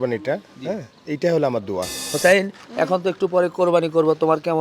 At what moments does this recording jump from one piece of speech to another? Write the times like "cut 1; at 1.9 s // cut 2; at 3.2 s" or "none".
cut 1; at 2.0 s